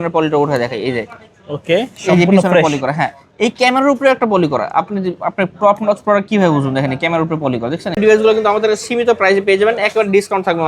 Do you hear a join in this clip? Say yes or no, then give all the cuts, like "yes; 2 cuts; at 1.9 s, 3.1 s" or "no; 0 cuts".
yes; 1 cut; at 8.0 s